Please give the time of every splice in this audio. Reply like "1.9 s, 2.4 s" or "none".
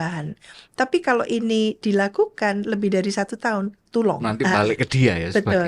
4.3 s